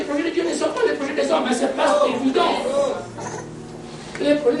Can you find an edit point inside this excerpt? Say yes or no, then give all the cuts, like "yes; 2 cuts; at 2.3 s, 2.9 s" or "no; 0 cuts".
no; 0 cuts